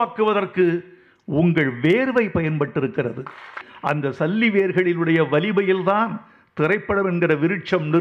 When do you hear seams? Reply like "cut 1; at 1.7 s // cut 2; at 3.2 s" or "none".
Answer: cut 1; at 3.6 s

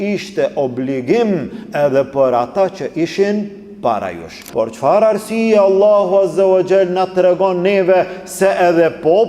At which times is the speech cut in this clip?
cut 1; at 4.4 s

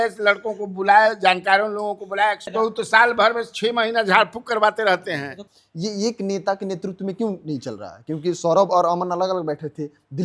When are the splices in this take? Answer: cut 1; at 2.5 s // cut 2; at 5.4 s

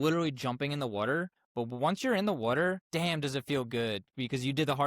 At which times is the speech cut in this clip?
cut 1; at 1.4 s // cut 2; at 2.8 s

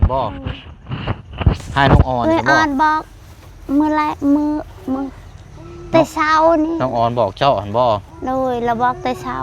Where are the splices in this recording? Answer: cut 1; at 2.2 s

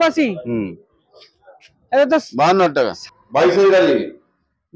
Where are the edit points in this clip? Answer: cut 1; at 3.0 s

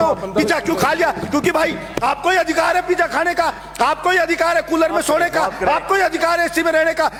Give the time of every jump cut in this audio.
none

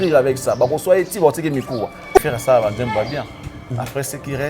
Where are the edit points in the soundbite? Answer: cut 1; at 2.2 s

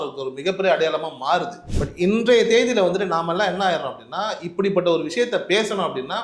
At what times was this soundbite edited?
cut 1; at 1.6 s

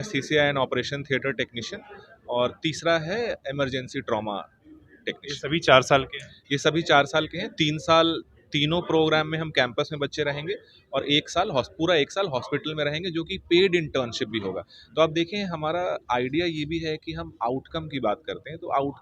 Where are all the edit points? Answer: none

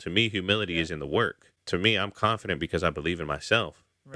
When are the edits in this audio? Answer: cut 1; at 1.5 s

